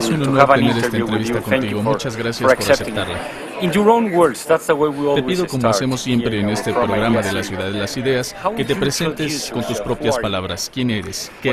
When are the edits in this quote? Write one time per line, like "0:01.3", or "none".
0:06.6